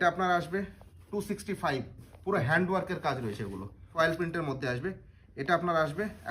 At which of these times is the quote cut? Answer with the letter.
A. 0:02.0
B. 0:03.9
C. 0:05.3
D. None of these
B